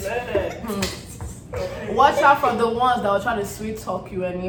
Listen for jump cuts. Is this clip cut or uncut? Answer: uncut